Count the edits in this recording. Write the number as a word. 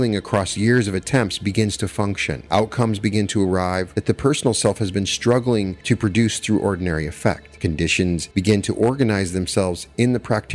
four